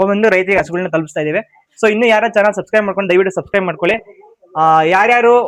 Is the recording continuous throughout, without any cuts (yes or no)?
yes